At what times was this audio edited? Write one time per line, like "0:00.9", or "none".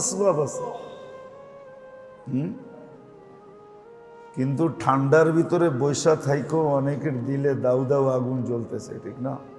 0:02.9
0:04.3